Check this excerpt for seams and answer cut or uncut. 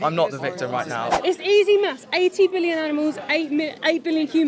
cut